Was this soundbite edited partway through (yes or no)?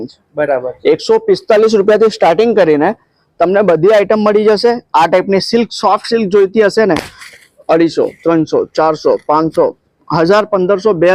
no